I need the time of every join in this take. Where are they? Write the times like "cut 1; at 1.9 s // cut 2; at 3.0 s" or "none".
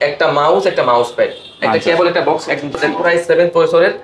cut 1; at 2.9 s